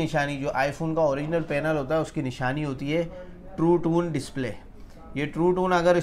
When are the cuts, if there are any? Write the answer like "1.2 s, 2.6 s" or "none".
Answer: none